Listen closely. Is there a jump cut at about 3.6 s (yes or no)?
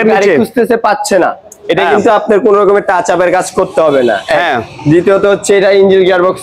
no